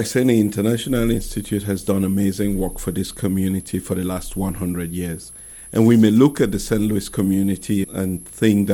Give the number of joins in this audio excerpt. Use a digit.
0